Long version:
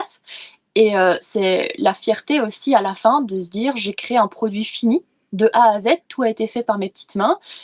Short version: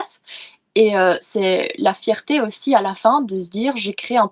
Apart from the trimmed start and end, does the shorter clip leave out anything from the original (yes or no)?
no